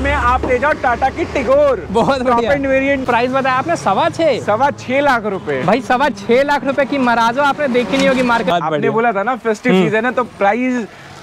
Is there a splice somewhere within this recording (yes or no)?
yes